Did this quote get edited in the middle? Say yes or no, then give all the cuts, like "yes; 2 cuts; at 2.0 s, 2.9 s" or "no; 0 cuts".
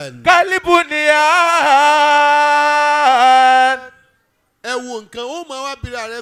no; 0 cuts